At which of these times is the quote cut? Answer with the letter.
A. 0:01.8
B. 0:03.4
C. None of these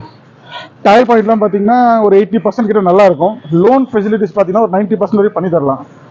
C